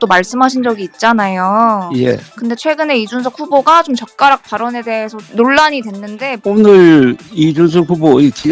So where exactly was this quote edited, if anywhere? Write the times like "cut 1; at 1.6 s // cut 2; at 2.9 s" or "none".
cut 1; at 6.4 s